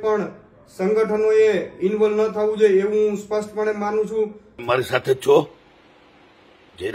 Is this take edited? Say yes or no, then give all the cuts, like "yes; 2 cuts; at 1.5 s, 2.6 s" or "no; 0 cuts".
yes; 1 cut; at 4.5 s